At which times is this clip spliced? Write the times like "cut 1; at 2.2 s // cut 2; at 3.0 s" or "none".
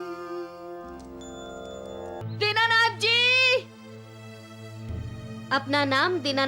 cut 1; at 2.2 s

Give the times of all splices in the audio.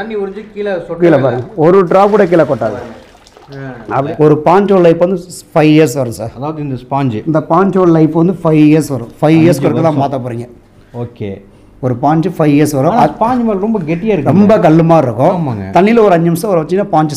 cut 1; at 4.0 s

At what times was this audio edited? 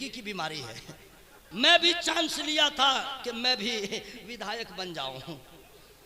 cut 1; at 1.3 s

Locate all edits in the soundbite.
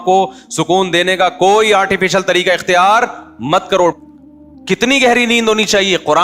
cut 1; at 4.0 s

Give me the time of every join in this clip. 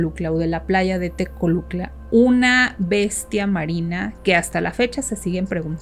cut 1; at 4.1 s

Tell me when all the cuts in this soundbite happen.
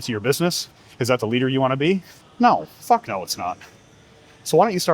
cut 1; at 2.2 s

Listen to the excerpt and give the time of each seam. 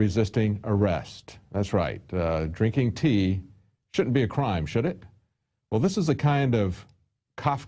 cut 1; at 6.4 s

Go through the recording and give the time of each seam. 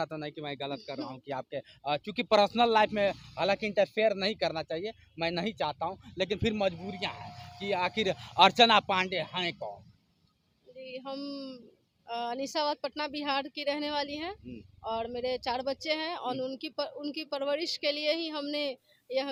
none

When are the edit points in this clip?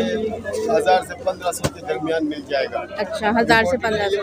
none

